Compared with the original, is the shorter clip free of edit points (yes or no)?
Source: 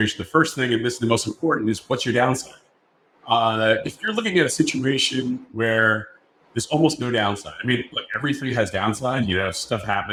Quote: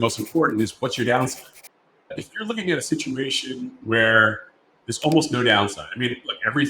no